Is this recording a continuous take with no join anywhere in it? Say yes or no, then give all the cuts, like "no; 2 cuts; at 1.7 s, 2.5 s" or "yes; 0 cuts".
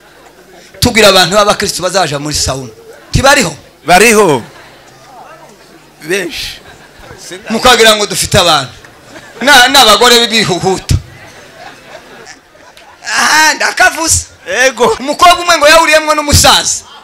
no; 2 cuts; at 12.3 s, 15.0 s